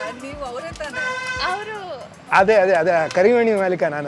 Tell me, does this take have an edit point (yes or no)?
no